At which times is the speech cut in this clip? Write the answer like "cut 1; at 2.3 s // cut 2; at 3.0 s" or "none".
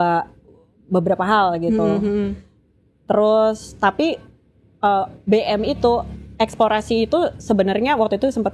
none